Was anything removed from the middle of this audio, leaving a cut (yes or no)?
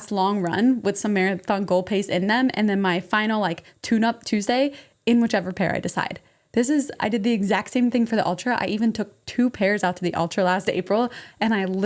no